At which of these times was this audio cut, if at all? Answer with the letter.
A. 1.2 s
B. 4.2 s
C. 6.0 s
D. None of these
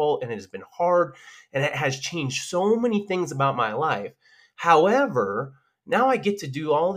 D